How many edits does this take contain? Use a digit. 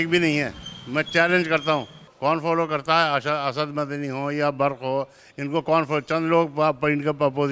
1